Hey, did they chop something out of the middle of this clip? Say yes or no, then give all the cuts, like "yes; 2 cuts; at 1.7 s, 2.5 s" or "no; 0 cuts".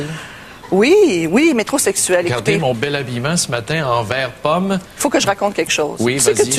yes; 1 cut; at 5.4 s